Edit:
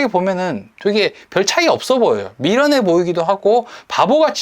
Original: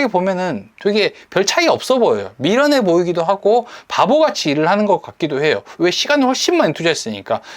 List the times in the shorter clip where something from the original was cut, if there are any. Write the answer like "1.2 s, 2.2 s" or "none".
none